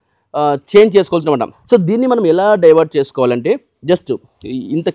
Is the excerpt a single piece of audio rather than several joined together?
no; 1 cut; at 1.5 s

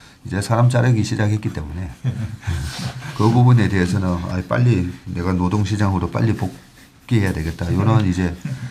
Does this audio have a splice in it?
no; 0 cuts

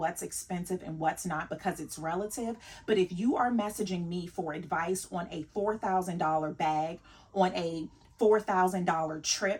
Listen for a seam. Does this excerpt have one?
no; 0 cuts

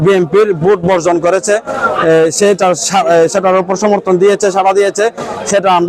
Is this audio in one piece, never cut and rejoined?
yes; 0 cuts

